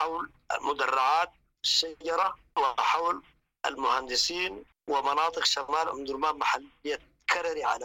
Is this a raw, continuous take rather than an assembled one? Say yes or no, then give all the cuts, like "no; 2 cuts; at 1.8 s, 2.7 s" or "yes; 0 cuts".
yes; 0 cuts